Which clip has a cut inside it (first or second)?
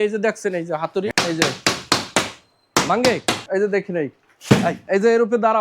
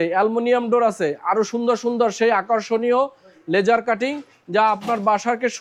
first